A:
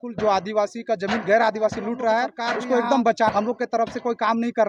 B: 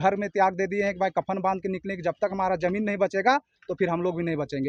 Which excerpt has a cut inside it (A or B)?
A